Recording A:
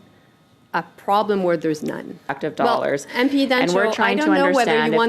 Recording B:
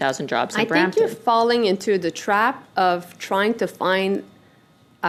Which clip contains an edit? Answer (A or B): A